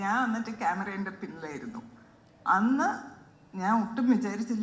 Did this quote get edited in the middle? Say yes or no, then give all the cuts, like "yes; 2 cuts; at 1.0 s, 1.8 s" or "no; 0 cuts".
no; 0 cuts